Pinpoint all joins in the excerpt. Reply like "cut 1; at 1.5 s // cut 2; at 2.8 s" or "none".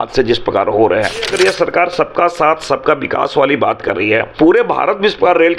cut 1; at 1.3 s // cut 2; at 4.3 s